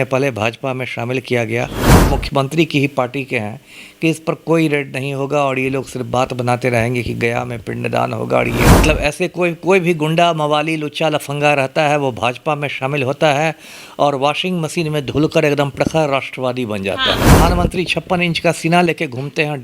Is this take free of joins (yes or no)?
no